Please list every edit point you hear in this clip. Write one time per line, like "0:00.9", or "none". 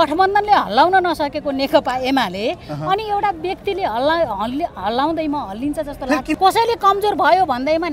0:06.3